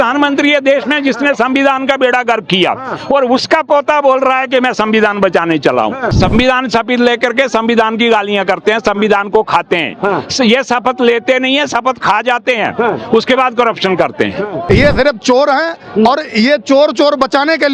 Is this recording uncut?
no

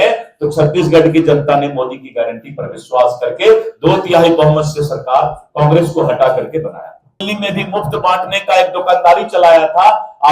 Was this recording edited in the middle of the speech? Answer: yes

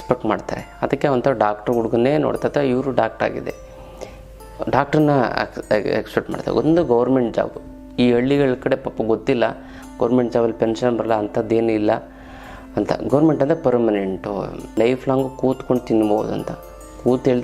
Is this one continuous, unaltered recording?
no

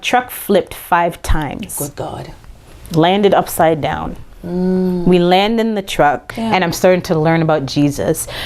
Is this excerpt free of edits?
no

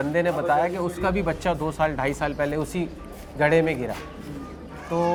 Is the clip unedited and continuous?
yes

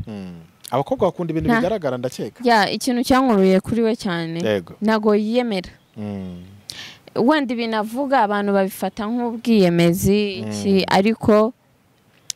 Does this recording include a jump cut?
no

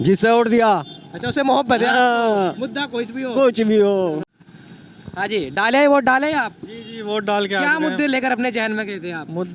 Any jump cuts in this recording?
no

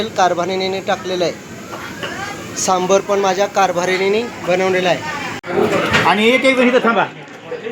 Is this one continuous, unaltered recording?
yes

